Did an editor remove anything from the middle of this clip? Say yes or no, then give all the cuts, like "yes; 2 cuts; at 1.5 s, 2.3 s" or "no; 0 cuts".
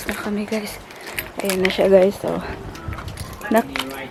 no; 0 cuts